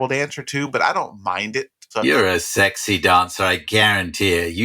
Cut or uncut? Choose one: cut